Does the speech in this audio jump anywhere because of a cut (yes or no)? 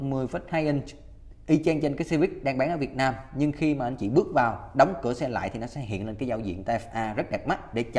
no